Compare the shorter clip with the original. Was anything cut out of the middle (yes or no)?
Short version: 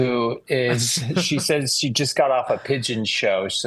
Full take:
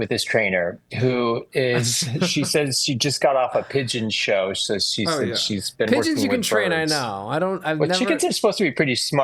no